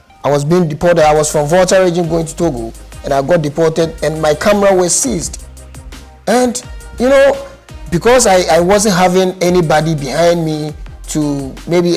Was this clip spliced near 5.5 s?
no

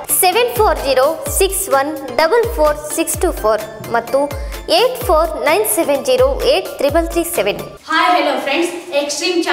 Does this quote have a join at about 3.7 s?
no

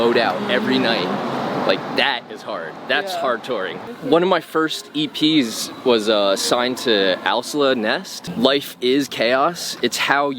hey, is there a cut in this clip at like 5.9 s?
no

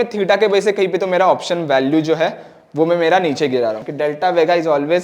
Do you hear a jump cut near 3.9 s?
yes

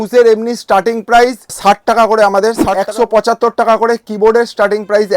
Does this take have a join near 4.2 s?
no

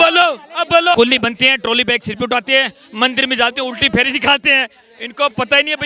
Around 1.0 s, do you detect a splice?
yes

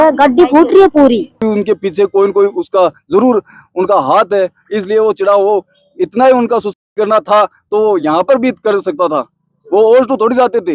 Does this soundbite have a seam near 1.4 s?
yes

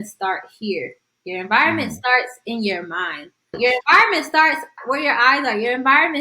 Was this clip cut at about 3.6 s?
yes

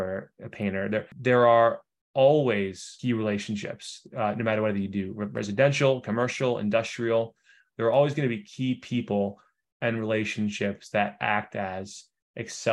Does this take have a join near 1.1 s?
yes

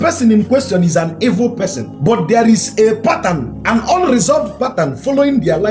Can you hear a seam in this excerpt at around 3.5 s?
yes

